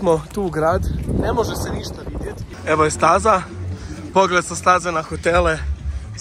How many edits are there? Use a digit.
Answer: 1